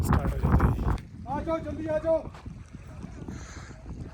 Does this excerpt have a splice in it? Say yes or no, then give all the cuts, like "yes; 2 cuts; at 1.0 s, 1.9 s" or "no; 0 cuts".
yes; 1 cut; at 1.1 s